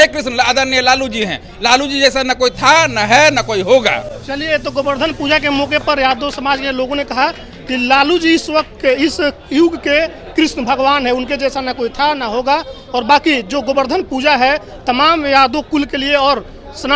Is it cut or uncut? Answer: uncut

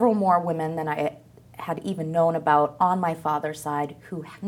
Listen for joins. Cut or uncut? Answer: uncut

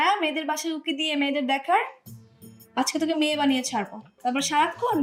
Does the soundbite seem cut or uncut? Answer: uncut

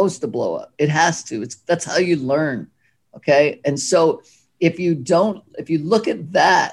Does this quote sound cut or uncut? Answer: uncut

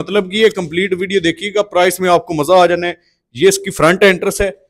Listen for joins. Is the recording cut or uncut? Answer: uncut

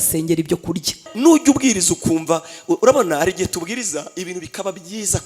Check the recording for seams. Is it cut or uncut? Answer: cut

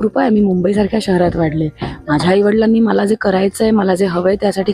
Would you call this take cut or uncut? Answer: uncut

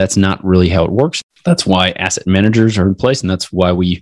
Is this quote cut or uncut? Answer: cut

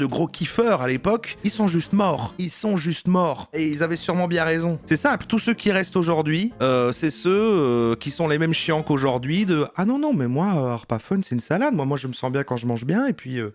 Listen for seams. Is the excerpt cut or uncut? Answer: cut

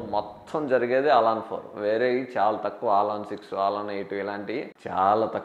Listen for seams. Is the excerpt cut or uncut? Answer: uncut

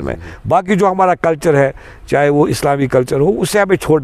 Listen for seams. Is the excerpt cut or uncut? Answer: uncut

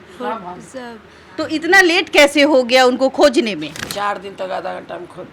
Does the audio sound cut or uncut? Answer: cut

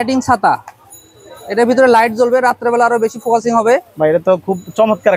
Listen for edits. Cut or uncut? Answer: uncut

